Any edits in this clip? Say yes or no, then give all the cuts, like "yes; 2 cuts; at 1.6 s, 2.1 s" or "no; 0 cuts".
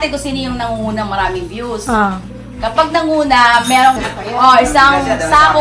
yes; 1 cut; at 4.0 s